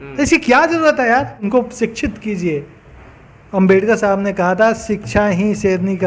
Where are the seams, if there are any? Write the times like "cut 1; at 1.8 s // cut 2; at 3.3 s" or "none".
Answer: cut 1; at 1.5 s